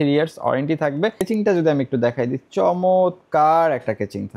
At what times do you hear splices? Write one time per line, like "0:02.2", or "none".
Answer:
0:01.3